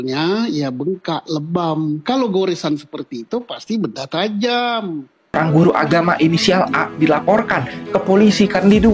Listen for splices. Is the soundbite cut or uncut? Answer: cut